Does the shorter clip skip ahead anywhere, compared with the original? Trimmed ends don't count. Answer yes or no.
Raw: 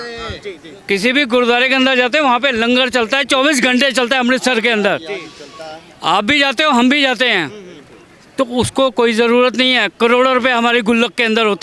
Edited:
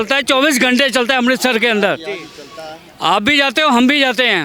no